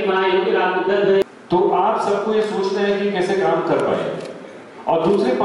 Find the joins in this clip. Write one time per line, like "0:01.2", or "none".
0:01.2